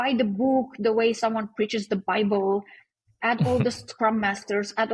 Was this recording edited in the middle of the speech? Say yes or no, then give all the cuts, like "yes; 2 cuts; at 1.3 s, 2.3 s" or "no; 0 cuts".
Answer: no; 0 cuts